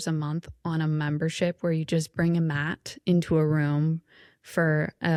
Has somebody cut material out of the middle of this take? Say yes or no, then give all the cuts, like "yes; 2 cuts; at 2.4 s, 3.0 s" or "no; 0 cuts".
no; 0 cuts